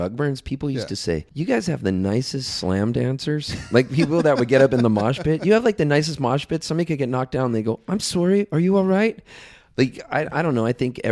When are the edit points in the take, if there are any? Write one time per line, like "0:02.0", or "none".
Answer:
0:01.3